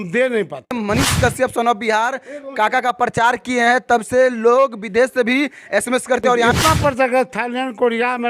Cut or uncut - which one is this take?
cut